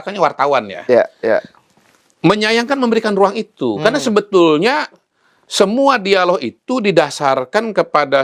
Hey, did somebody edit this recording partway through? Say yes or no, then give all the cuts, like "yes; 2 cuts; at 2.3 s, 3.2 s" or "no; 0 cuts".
no; 0 cuts